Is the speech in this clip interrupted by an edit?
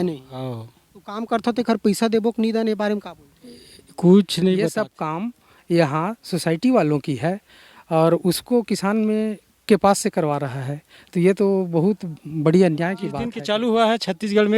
yes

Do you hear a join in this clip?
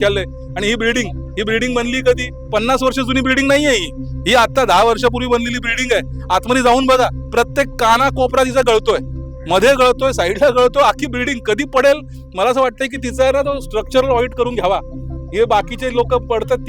no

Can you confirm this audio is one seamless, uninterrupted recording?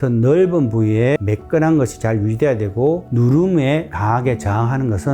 no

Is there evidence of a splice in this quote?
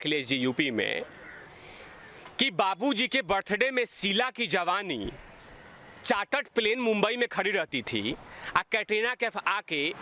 no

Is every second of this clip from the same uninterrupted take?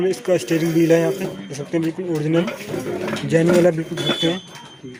yes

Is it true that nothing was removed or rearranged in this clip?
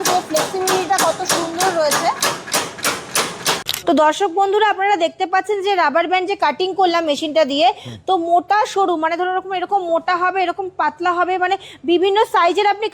no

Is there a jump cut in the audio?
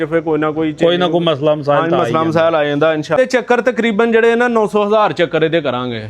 yes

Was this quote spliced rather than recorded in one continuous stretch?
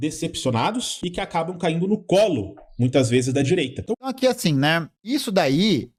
no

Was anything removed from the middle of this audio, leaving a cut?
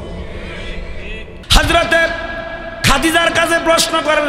yes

